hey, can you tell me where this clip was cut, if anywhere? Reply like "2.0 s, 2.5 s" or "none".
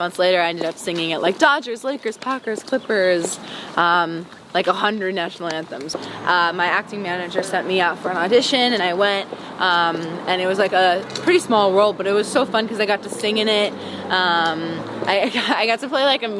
5.9 s